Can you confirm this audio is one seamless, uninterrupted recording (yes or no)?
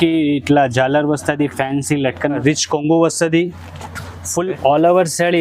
no